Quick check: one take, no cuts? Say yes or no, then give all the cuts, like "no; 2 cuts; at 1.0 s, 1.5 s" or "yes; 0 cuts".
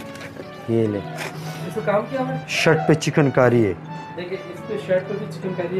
no; 1 cut; at 1.2 s